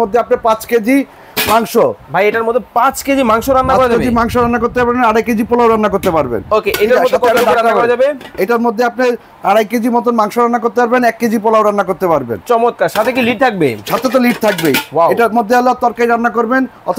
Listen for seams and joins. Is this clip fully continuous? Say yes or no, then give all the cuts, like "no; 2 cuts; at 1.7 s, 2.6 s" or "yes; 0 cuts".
yes; 0 cuts